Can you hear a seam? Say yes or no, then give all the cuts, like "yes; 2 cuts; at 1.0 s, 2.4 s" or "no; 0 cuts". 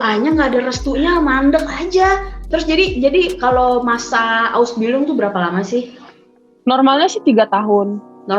no; 0 cuts